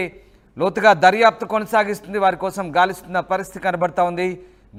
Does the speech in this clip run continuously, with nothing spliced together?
yes; 0 cuts

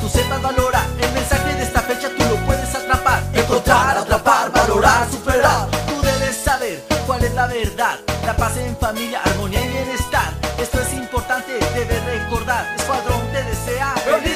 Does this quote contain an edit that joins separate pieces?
no; 0 cuts

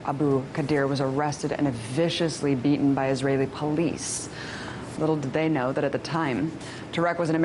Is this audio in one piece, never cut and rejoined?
yes; 0 cuts

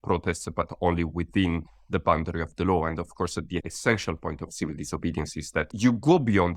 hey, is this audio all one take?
no; 2 cuts; at 3.7 s, 5.7 s

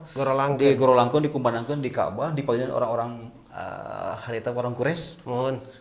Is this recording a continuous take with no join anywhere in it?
yes; 0 cuts

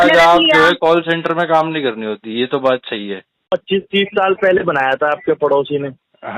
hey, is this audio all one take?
no; 1 cut; at 3.5 s

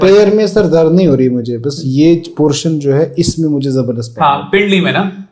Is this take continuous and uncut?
yes; 0 cuts

